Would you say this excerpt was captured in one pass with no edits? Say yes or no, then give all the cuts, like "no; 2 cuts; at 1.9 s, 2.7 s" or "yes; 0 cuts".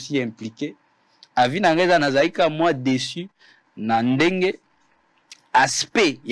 yes; 0 cuts